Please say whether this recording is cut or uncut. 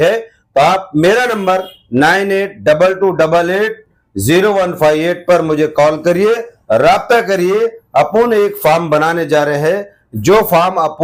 uncut